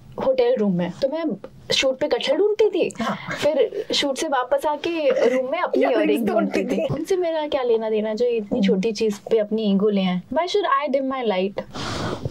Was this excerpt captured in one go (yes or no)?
no